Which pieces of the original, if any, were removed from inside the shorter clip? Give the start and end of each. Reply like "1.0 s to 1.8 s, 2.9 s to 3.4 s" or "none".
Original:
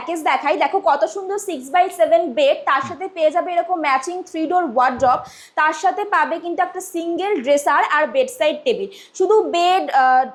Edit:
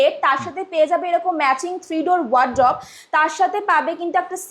none